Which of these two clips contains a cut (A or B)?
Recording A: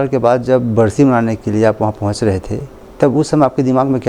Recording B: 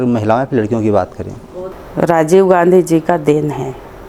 B